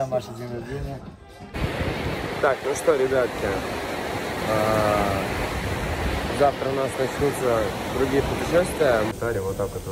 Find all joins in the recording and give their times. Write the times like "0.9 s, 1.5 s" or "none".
1.5 s, 9.1 s